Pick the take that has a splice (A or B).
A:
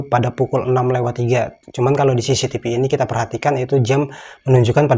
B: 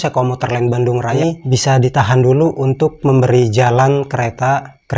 B